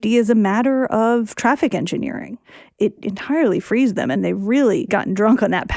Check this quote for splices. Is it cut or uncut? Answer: cut